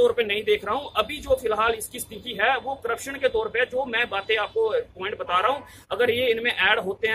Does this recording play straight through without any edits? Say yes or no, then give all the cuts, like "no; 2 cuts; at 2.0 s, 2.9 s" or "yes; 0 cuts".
yes; 0 cuts